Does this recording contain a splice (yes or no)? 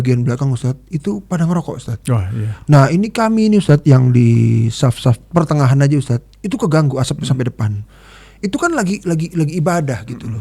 yes